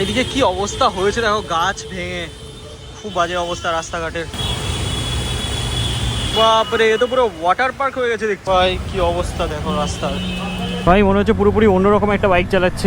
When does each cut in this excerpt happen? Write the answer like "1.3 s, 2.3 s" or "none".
4.3 s, 6.3 s, 8.4 s, 10.8 s